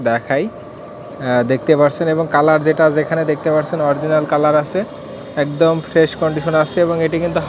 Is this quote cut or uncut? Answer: uncut